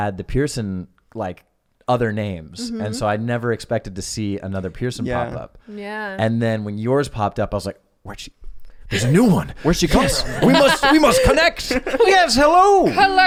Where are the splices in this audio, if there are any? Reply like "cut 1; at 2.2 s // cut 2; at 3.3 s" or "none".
none